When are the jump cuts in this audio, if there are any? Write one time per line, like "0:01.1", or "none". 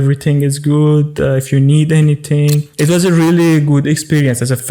0:02.7